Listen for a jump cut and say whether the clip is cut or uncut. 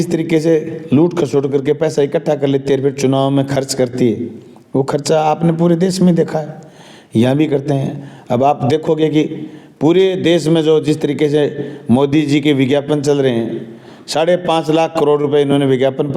uncut